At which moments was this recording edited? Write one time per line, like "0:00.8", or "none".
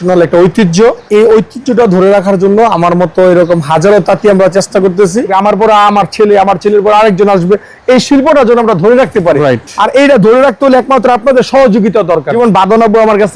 0:01.0
0:05.3
0:12.3